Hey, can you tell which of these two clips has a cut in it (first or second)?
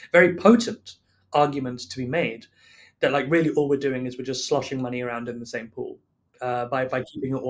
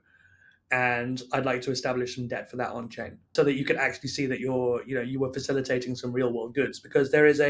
second